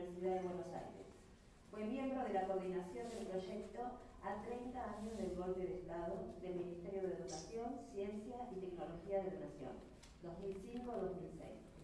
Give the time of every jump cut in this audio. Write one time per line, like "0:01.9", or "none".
none